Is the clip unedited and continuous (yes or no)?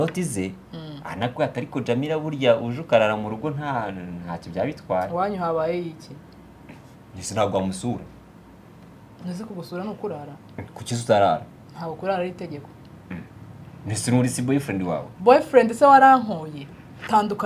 yes